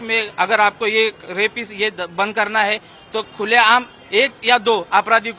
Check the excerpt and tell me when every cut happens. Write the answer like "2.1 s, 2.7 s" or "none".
none